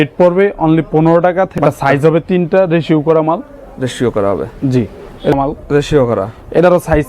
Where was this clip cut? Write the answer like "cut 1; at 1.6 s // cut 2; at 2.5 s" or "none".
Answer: cut 1; at 1.5 s // cut 2; at 5.3 s